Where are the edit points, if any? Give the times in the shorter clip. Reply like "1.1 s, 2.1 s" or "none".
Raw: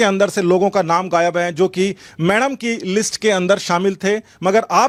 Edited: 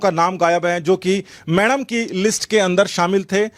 none